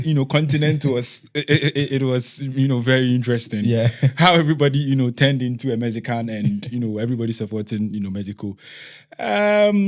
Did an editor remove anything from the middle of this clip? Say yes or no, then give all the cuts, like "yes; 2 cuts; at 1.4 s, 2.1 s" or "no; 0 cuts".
no; 0 cuts